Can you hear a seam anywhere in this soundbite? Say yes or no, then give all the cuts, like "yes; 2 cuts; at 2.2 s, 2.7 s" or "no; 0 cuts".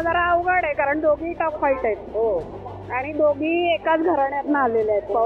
no; 0 cuts